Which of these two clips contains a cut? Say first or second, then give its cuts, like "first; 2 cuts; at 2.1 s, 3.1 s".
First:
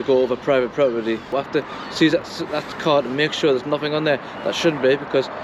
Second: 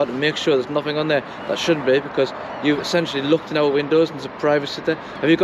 first; 1 cut; at 1.3 s